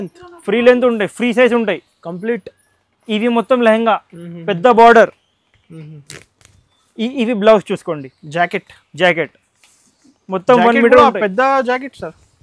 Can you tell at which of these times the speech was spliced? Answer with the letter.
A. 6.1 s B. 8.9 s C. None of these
C